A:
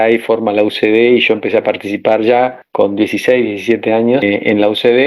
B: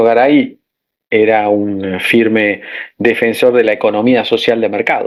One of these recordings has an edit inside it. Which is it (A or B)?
A